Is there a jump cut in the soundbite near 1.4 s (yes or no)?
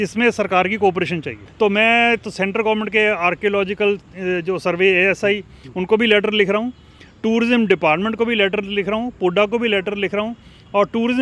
yes